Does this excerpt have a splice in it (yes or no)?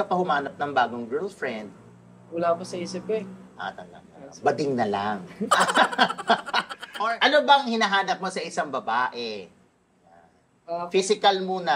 yes